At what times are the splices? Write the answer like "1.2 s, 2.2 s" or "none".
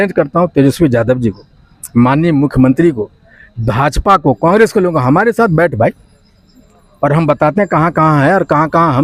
none